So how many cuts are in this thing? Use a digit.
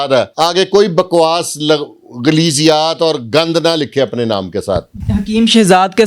1